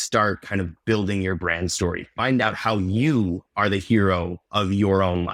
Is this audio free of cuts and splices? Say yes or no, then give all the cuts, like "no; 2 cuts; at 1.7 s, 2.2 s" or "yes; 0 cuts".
yes; 0 cuts